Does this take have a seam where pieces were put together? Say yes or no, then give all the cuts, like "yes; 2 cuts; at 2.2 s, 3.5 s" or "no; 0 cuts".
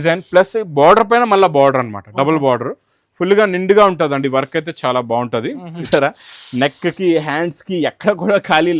yes; 1 cut; at 5.9 s